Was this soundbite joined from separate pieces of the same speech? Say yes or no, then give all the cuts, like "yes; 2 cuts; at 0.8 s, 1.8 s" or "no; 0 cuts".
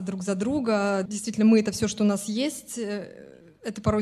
yes; 1 cut; at 1.1 s